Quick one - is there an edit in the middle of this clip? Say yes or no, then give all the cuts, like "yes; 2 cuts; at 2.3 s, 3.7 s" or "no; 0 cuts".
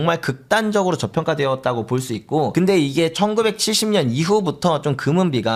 no; 0 cuts